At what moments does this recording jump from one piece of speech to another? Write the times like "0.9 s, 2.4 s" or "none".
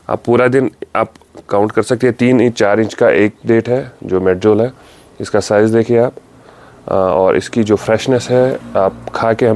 none